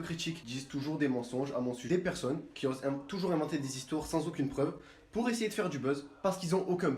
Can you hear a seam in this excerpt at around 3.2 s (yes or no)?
no